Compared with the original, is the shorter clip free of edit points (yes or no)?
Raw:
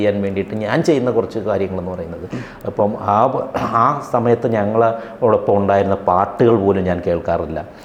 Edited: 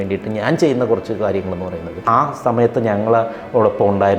no